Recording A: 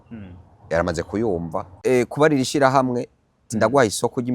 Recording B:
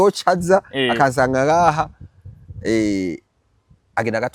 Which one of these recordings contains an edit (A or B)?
A